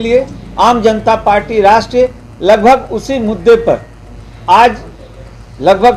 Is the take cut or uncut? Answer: uncut